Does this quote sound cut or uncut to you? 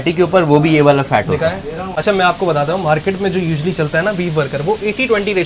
cut